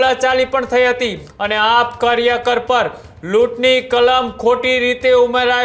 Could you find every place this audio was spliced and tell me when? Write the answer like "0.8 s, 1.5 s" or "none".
1.2 s